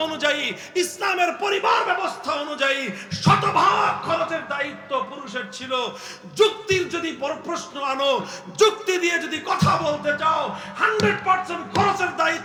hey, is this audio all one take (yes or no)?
yes